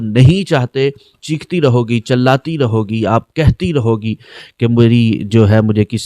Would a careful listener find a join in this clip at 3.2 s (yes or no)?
no